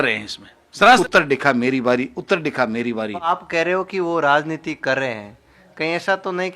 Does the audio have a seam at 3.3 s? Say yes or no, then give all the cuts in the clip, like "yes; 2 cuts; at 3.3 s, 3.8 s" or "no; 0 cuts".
yes; 2 cuts; at 1.0 s, 3.3 s